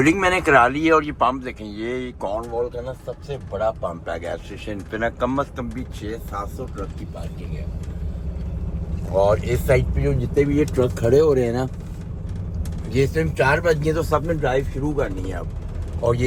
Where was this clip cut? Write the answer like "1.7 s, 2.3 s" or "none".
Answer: none